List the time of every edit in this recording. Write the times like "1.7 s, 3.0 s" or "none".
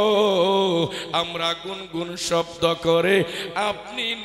none